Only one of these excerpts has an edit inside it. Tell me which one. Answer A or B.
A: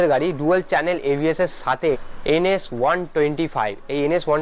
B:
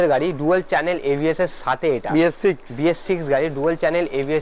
A